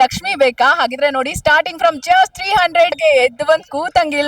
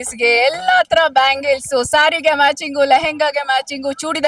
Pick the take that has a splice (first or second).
first